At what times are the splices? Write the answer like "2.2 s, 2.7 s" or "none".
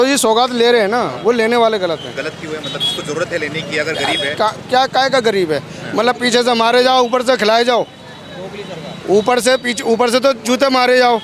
none